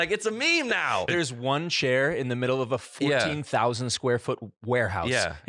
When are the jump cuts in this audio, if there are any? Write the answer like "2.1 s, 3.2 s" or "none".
1.1 s